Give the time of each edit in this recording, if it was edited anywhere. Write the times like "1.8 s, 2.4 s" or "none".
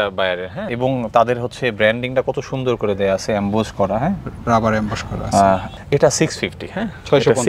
5.8 s